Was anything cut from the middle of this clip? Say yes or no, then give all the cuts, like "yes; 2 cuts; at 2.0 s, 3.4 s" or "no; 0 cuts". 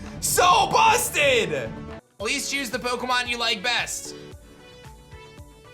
yes; 1 cut; at 2.0 s